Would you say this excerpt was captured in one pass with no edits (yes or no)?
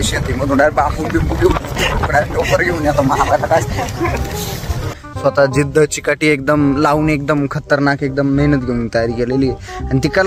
no